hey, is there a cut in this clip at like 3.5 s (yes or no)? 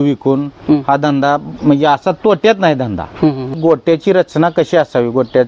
yes